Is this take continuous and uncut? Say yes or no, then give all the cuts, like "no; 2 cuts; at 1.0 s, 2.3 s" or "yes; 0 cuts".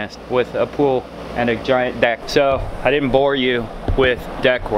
no; 1 cut; at 2.2 s